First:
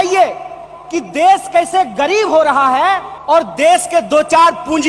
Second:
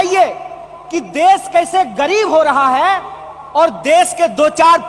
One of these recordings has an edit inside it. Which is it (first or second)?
first